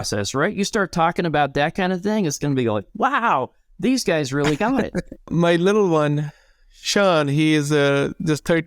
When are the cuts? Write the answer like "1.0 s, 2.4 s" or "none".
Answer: 5.3 s